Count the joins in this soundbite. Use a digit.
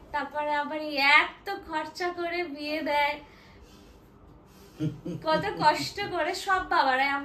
0